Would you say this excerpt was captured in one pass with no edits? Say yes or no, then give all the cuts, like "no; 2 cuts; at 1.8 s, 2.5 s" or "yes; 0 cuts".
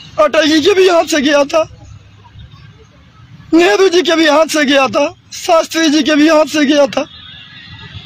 yes; 0 cuts